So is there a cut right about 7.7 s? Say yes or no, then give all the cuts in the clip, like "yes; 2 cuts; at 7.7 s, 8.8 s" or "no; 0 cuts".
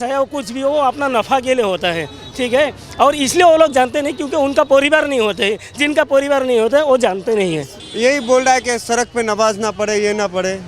yes; 1 cut; at 7.7 s